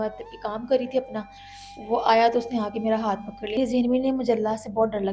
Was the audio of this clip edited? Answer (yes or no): yes